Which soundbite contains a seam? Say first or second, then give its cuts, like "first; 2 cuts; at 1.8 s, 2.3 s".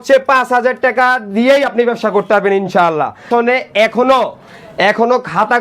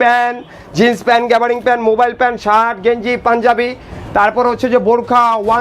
first; 1 cut; at 3.3 s